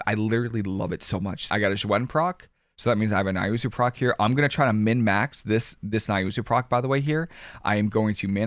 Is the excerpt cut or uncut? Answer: cut